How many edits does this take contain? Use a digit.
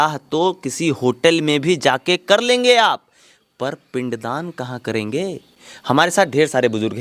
0